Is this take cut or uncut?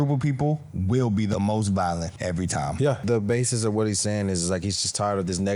cut